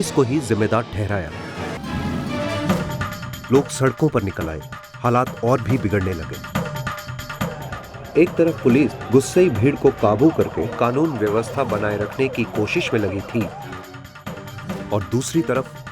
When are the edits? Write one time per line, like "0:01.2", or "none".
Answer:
0:01.7